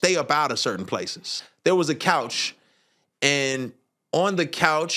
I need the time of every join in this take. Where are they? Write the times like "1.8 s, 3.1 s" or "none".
1.4 s